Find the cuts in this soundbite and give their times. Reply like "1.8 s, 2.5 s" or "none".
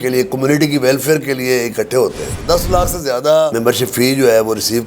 2.2 s